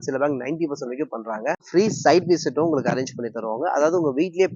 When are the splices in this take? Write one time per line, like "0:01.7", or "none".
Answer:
0:01.6